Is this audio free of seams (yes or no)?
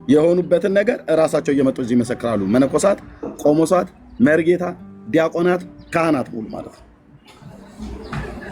yes